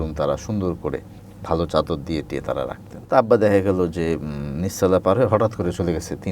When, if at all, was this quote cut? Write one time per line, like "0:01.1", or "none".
0:02.9